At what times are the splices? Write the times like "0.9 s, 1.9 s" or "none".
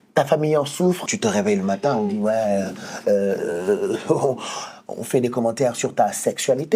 1.1 s